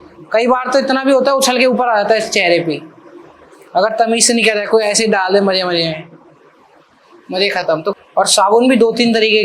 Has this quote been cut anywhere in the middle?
yes; 1 cut; at 7.9 s

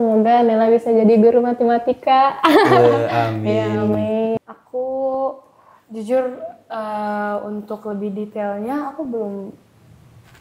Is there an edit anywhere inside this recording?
yes; 1 cut; at 4.3 s

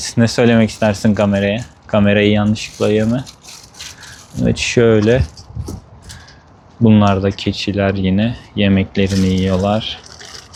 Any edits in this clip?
no; 0 cuts

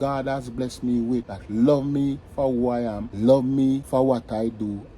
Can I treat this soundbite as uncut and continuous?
no; 3 cuts; at 1.4 s, 3.1 s, 3.8 s

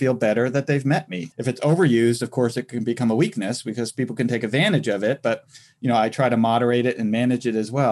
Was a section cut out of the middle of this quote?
yes; 1 cut; at 1.2 s

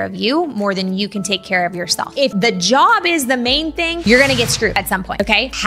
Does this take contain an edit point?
yes; 1 cut; at 2.1 s

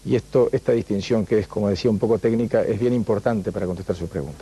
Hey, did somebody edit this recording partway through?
yes; 1 cut; at 1.3 s

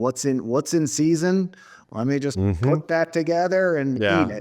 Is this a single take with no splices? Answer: yes; 0 cuts

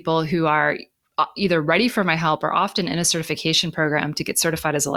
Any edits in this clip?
no; 0 cuts

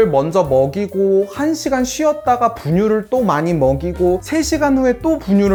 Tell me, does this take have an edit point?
no; 0 cuts

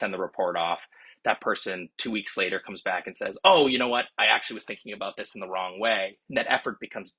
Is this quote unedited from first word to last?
no; 1 cut; at 6.2 s

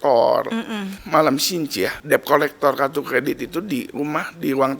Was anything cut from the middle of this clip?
yes; 2 cuts; at 0.9 s, 2.0 s

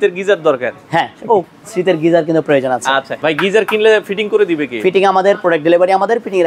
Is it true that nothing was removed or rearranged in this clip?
no; 1 cut; at 3.1 s

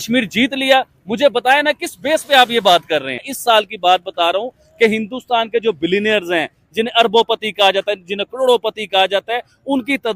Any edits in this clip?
yes; 1 cut; at 3.3 s

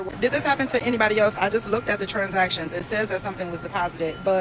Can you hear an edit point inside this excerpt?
no; 0 cuts

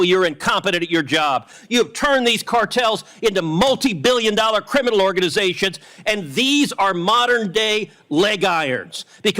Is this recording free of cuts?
no; 1 cut; at 1.5 s

